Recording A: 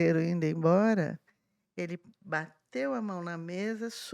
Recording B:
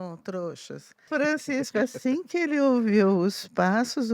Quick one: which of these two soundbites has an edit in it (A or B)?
B